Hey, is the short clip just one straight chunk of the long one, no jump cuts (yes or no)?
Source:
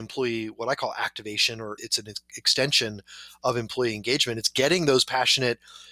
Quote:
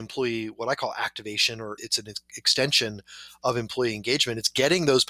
yes